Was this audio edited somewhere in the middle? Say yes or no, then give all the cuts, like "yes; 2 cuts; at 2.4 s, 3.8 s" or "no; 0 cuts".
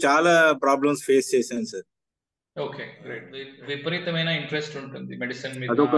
yes; 1 cut; at 3.5 s